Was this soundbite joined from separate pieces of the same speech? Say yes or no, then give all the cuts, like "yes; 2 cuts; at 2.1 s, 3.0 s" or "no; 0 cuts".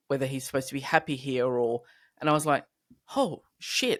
no; 0 cuts